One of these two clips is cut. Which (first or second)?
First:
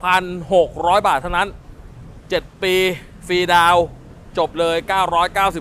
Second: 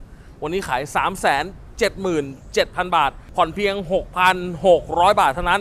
second